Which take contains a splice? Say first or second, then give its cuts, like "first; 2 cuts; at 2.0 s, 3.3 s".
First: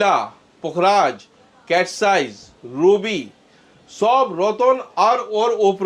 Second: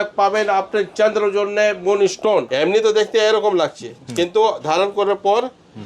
second; 1 cut; at 2.5 s